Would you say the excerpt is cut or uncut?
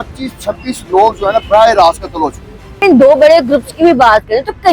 cut